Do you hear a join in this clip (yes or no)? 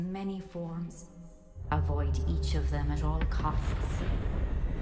no